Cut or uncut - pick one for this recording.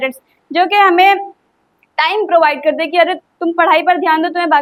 uncut